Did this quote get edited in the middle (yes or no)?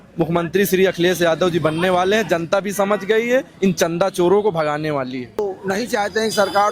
yes